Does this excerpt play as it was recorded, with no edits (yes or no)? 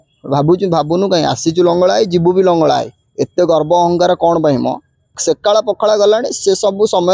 no